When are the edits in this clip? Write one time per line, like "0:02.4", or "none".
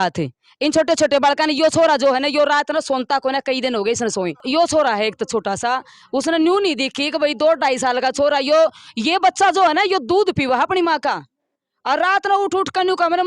0:04.4